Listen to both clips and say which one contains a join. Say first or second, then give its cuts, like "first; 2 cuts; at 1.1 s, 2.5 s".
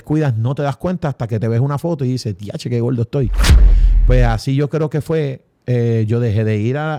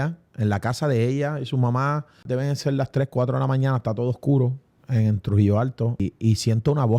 second; 2 cuts; at 2.2 s, 6.0 s